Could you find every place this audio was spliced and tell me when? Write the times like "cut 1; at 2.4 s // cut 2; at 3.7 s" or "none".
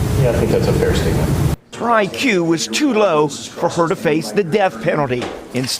cut 1; at 1.6 s